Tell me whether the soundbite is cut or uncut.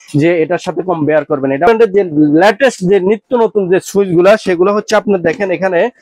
cut